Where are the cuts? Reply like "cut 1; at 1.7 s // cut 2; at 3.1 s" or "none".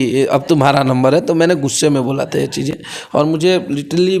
none